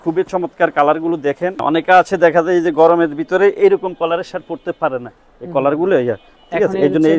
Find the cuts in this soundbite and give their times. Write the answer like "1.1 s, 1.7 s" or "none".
1.6 s